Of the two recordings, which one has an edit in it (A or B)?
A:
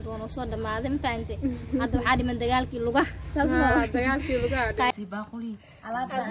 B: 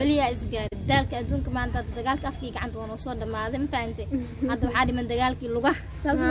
A